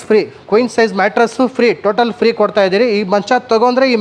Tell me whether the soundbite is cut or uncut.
uncut